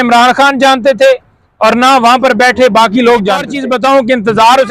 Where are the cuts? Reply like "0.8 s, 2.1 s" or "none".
3.6 s